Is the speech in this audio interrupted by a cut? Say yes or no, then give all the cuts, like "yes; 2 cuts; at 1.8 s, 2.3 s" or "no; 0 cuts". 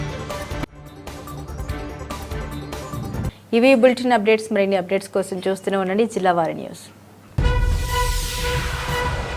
no; 0 cuts